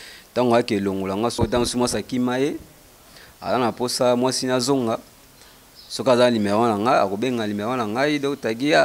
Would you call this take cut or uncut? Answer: cut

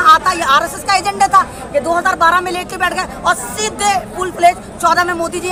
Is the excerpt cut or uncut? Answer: uncut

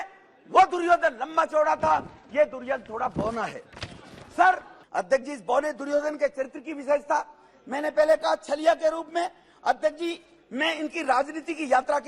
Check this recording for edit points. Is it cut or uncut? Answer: cut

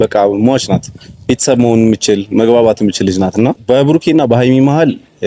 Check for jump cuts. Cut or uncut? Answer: cut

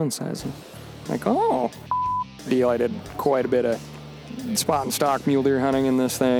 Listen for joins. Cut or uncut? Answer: cut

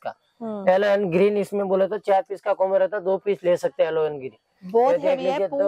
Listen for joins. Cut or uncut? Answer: uncut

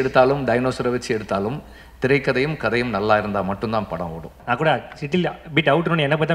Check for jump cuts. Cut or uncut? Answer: cut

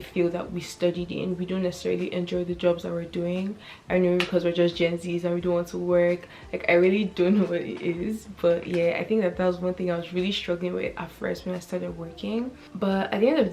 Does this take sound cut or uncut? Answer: uncut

